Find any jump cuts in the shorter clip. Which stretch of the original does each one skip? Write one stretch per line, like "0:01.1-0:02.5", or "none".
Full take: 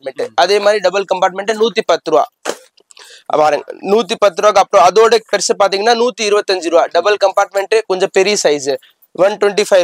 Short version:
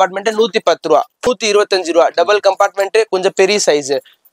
0:02.5-0:06.0